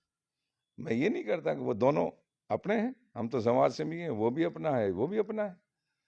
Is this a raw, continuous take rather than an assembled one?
yes; 0 cuts

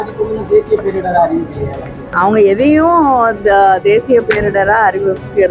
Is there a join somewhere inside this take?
yes; 1 cut; at 2.0 s

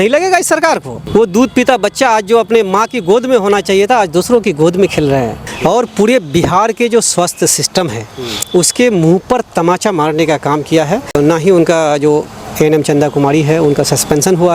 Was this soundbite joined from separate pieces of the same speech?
yes; 3 cuts; at 0.9 s, 5.4 s, 11.1 s

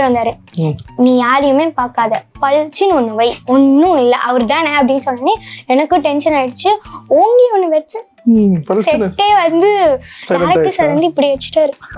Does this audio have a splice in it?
no; 0 cuts

